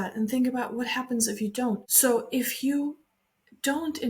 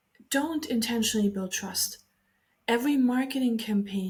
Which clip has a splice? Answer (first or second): first